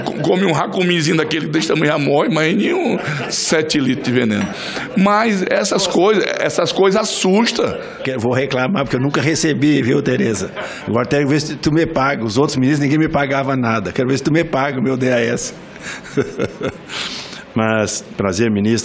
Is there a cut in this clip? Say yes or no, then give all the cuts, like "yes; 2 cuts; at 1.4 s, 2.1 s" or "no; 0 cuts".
yes; 1 cut; at 8.0 s